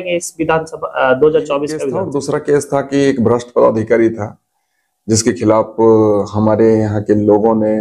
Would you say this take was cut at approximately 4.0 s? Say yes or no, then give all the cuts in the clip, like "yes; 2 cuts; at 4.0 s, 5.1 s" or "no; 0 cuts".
no; 1 cut; at 1.9 s